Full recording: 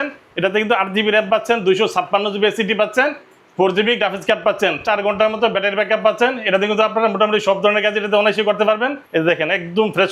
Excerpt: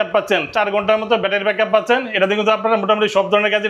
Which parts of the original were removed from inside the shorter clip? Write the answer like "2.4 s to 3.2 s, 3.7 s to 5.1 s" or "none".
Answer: none